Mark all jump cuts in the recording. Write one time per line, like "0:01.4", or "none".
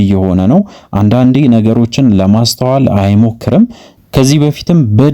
0:04.0